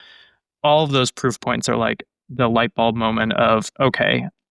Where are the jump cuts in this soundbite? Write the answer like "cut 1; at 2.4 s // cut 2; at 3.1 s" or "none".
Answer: none